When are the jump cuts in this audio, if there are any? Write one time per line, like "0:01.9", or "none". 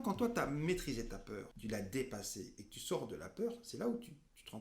0:01.5